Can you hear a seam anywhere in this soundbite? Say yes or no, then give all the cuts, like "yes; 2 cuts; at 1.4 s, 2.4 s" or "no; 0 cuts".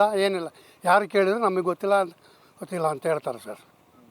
no; 0 cuts